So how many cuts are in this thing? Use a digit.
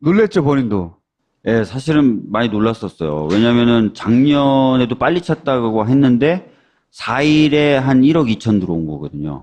1